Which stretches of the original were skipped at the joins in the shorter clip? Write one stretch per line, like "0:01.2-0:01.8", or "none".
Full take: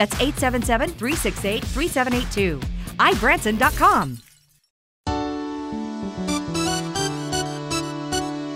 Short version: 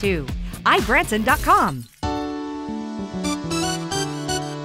0:04.2-0:04.9